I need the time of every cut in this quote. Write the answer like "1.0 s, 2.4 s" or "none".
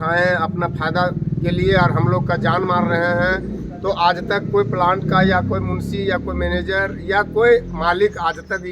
none